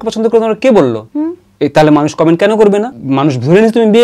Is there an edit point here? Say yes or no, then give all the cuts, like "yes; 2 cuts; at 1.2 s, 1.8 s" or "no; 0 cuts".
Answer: yes; 2 cuts; at 1.0 s, 3.0 s